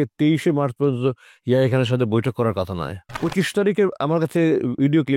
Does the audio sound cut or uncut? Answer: cut